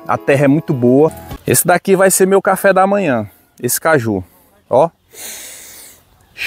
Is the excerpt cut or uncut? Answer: cut